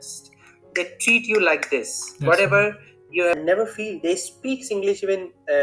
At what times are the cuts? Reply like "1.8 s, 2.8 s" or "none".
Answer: 3.3 s